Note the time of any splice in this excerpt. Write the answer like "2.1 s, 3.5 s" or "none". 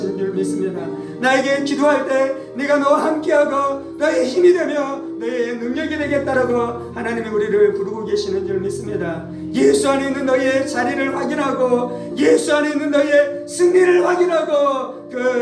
none